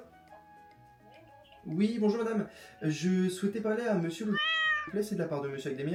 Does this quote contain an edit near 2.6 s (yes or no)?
no